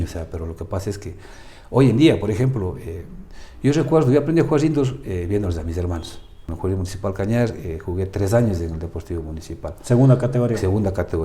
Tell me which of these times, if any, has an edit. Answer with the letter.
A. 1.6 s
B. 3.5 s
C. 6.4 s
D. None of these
C